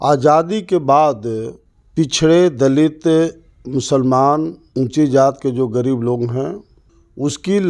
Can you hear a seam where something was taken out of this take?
no; 0 cuts

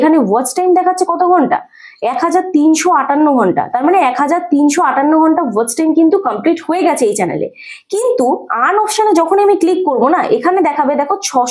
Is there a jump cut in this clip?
no; 0 cuts

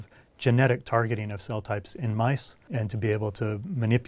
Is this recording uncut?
no; 1 cut; at 2.6 s

